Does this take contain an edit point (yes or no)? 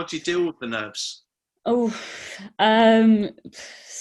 no